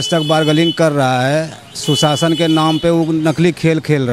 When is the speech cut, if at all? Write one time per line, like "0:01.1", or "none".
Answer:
none

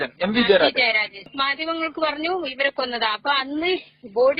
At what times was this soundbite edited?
0:01.3

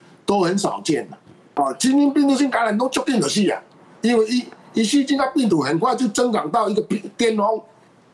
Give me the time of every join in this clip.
0:01.4

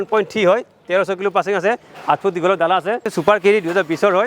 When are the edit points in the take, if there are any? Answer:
0:03.1

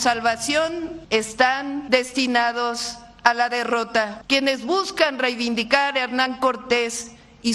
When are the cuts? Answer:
0:01.0
0:01.8
0:04.2

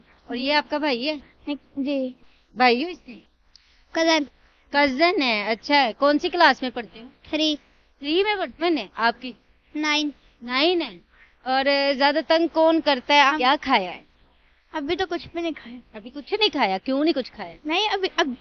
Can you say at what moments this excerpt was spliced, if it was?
0:08.6
0:13.3

